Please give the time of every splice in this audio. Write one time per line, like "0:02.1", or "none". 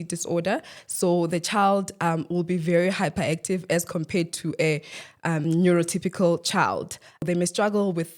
0:07.2